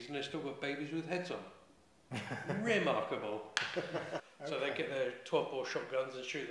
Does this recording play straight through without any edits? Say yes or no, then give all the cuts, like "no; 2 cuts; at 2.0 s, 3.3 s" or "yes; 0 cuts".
no; 1 cut; at 4.2 s